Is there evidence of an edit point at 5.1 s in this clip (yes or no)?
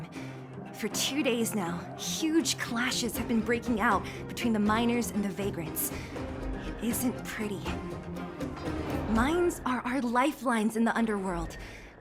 no